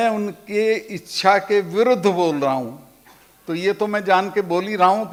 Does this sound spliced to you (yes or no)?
no